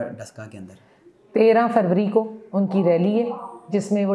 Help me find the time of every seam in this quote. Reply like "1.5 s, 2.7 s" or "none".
none